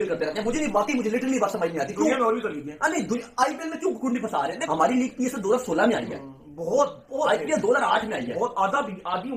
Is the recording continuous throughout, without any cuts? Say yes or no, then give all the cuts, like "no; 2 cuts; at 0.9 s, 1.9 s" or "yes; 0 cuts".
yes; 0 cuts